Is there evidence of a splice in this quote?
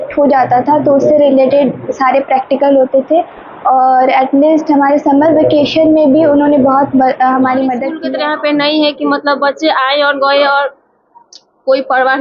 yes; 1 cut; at 7.9 s

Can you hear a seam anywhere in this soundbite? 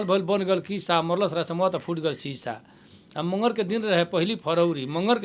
no; 0 cuts

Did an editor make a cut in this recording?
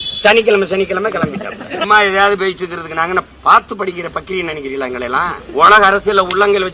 yes; 3 cuts; at 1.8 s, 3.3 s, 5.4 s

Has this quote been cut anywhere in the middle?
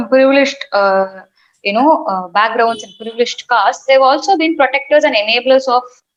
no; 0 cuts

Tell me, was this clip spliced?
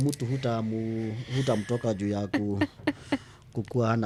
no; 0 cuts

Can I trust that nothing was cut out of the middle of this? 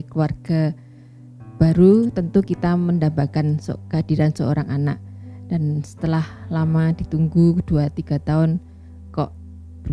yes; 0 cuts

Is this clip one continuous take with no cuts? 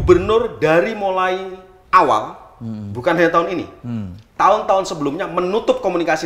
yes; 0 cuts

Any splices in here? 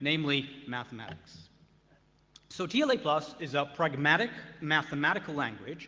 yes; 1 cut; at 4.8 s

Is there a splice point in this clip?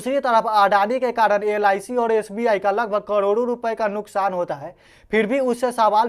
no; 0 cuts

